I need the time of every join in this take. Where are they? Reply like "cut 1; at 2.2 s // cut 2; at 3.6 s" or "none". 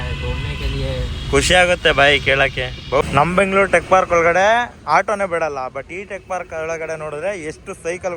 cut 1; at 3.0 s